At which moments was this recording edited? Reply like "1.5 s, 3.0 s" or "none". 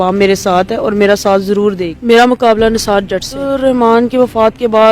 1.9 s, 3.5 s